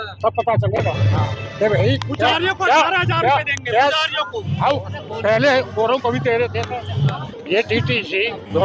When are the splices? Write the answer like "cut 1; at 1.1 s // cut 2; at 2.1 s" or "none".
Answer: none